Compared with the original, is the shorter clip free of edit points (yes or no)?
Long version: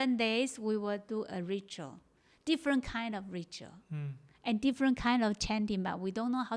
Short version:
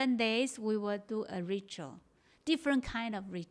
yes